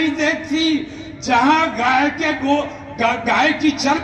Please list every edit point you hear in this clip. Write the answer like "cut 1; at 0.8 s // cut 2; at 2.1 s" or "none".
none

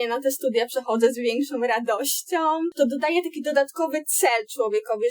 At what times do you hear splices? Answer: cut 1; at 2.7 s

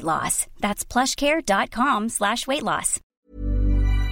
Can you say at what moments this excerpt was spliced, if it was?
cut 1; at 3.1 s

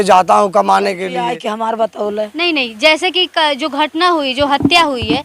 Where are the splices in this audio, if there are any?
cut 1; at 1.4 s

